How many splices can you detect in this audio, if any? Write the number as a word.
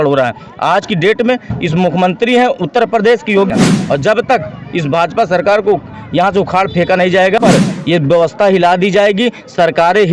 two